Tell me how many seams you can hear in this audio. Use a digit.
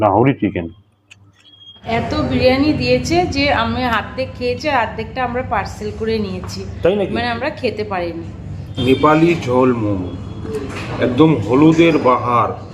2